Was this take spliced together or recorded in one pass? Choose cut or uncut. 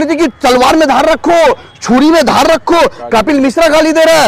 uncut